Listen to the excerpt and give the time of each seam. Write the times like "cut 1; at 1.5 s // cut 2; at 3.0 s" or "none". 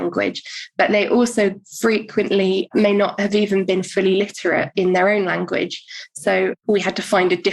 cut 1; at 2.7 s // cut 2; at 6.5 s